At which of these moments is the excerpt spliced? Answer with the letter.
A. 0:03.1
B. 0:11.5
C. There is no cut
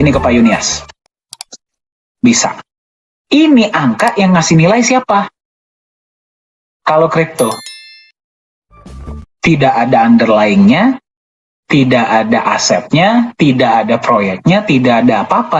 A